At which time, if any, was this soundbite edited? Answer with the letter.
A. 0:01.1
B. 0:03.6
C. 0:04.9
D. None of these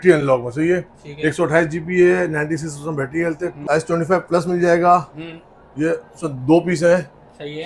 B